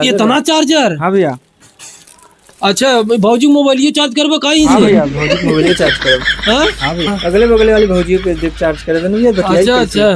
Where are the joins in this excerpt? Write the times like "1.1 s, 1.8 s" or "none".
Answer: 7.1 s